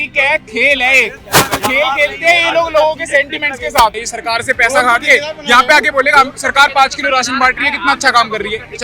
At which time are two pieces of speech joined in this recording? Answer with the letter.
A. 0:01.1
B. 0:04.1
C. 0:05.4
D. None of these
B